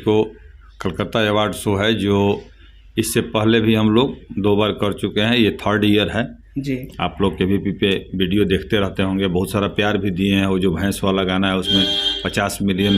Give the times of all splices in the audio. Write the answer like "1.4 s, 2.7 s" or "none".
none